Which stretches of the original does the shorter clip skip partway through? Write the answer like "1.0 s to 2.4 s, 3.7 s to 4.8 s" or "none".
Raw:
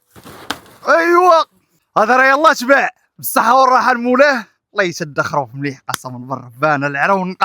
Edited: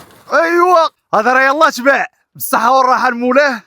1.5 s to 1.8 s